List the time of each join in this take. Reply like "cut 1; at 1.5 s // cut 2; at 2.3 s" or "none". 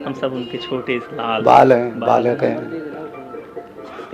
none